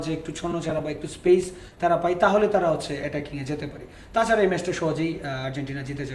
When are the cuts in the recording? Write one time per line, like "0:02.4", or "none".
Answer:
none